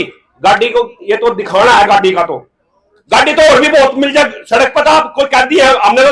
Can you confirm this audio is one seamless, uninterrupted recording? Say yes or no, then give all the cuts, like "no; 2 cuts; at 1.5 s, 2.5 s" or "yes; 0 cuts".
yes; 0 cuts